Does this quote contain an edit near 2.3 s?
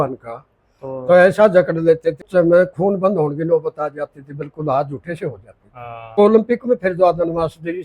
yes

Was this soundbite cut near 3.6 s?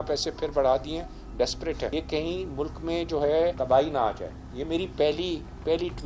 yes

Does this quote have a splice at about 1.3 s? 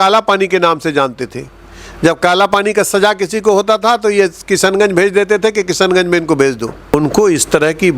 no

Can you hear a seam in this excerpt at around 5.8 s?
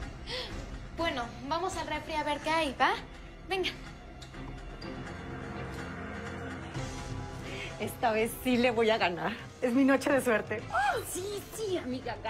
yes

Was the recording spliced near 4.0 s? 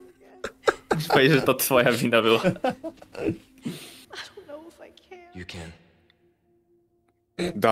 yes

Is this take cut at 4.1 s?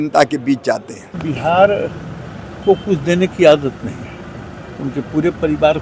no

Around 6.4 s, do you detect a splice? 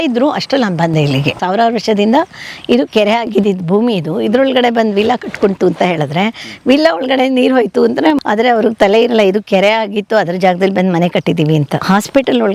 no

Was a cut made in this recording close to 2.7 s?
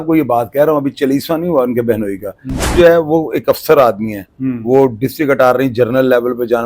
yes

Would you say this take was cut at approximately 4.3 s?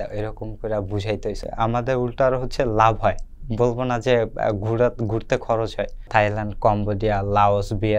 no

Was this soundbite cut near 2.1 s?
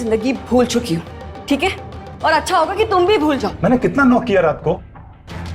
no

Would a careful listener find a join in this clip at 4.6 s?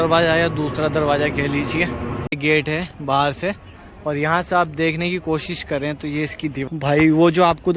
no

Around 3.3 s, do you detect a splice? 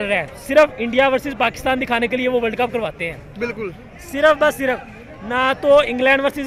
no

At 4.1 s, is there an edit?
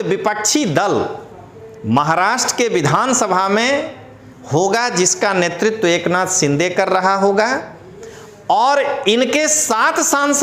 no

